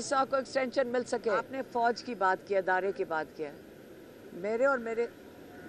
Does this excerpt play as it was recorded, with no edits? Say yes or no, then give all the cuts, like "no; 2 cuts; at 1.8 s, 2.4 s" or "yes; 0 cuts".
no; 1 cut; at 1.6 s